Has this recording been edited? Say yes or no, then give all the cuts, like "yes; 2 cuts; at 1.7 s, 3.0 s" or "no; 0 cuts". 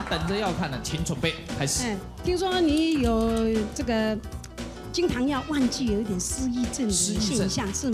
no; 0 cuts